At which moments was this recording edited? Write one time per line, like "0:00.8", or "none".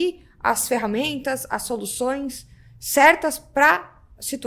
none